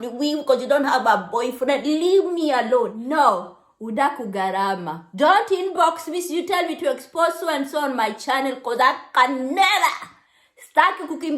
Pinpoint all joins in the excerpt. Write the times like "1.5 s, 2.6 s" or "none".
3.0 s